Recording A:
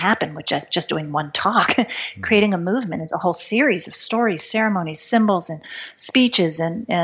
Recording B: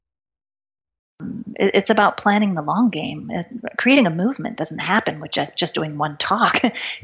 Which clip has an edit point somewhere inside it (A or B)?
B